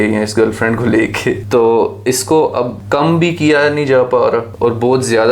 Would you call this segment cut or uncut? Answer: cut